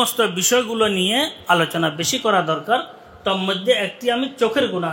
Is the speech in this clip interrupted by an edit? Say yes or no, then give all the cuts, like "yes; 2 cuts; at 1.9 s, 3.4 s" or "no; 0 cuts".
no; 0 cuts